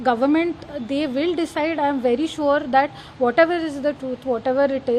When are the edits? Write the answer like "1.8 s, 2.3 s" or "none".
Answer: none